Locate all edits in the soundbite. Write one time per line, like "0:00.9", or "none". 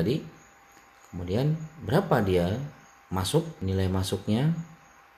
0:03.5